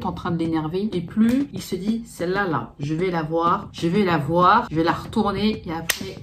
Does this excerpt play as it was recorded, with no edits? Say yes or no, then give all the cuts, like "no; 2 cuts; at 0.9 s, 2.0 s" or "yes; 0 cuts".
yes; 0 cuts